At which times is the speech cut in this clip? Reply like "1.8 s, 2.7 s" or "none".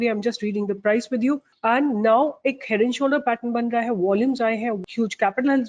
1.5 s, 4.8 s